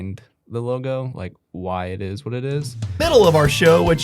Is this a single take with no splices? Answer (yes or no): no